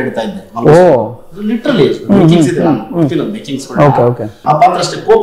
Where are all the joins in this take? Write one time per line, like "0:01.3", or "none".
0:04.3